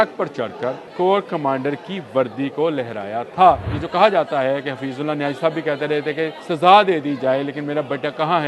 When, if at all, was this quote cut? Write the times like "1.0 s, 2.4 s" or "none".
0.8 s, 3.8 s, 6.4 s